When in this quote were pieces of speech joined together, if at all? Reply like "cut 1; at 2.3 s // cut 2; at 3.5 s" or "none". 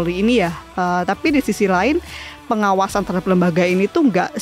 none